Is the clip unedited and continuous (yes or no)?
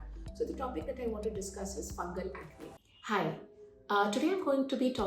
no